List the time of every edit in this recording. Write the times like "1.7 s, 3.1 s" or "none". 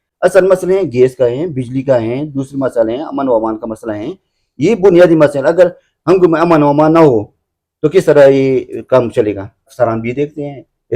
9.7 s